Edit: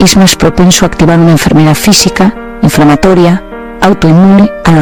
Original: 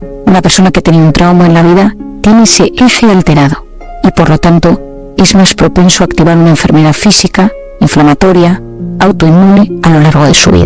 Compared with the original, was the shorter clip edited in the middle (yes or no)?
no